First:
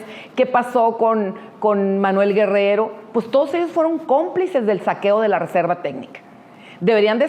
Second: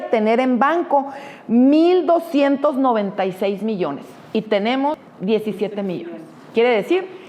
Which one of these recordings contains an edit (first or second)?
second